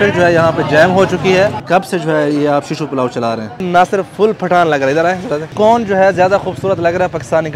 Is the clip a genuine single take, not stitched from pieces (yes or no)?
no